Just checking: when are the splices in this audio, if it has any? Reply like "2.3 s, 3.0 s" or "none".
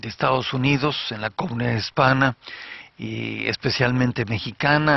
none